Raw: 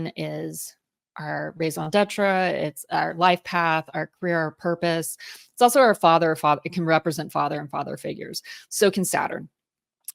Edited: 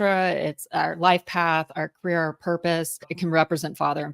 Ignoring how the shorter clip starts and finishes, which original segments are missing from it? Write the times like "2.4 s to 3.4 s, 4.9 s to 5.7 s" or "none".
5.3 s to 6.7 s